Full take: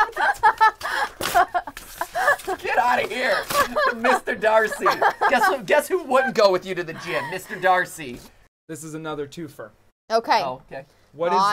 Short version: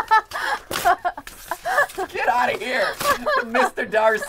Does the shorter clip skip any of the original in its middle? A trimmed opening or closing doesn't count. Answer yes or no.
no